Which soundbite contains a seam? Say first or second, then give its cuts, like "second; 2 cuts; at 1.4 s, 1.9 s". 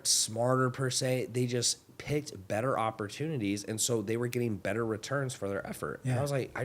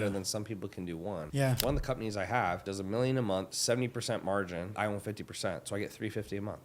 second; 4 cuts; at 1.5 s, 2.7 s, 3.5 s, 4.7 s